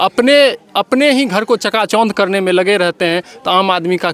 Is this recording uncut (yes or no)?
yes